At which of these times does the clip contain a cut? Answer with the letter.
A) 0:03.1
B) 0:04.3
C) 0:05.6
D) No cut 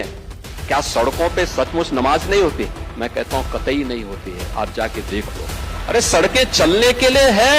C